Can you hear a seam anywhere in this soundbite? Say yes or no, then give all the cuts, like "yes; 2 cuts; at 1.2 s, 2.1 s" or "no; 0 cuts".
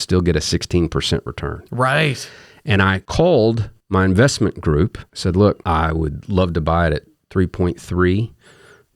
yes; 4 cuts; at 3.0 s, 3.7 s, 5.1 s, 5.6 s